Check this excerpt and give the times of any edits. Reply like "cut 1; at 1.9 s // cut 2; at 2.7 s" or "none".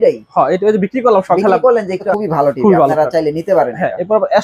cut 1; at 2.1 s